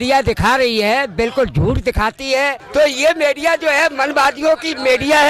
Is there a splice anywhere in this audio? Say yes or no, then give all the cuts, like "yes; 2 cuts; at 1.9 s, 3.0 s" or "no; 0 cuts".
yes; 1 cut; at 2.6 s